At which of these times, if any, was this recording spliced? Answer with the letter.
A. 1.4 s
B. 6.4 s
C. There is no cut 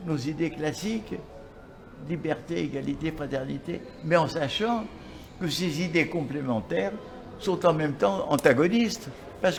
C